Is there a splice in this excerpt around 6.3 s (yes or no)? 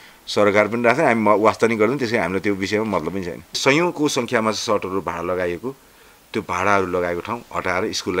no